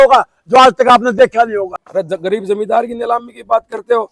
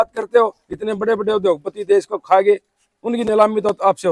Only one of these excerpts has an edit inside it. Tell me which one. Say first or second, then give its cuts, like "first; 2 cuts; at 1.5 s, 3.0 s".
first; 1 cut; at 1.8 s